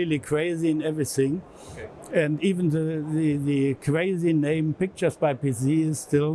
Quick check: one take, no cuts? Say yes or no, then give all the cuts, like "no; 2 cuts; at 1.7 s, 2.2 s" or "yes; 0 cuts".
yes; 0 cuts